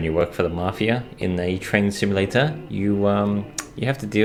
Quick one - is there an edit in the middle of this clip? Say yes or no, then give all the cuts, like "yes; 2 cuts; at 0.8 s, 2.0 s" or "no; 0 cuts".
no; 0 cuts